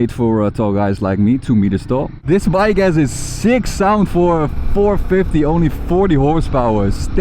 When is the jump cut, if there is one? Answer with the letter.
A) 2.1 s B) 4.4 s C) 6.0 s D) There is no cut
A